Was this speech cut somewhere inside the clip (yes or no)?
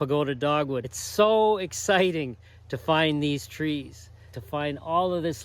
yes